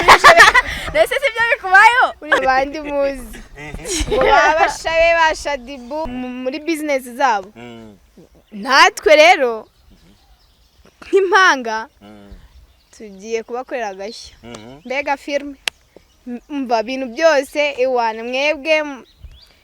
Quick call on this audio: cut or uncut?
cut